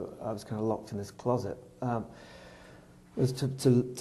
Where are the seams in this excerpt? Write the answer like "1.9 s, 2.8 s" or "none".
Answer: 3.0 s